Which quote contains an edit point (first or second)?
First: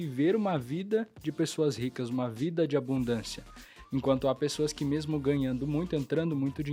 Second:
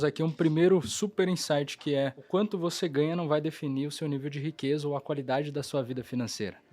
second